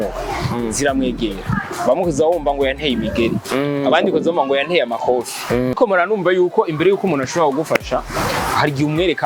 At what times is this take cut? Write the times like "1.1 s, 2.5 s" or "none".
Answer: 5.8 s